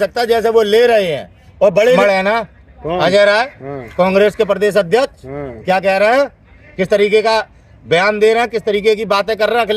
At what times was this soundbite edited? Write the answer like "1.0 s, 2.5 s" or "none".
2.0 s